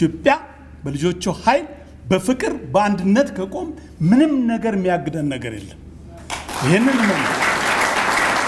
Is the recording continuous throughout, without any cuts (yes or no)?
yes